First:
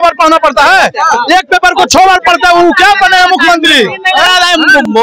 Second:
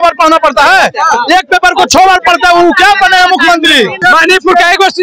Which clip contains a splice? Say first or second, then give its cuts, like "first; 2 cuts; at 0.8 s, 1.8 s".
second; 1 cut; at 4.0 s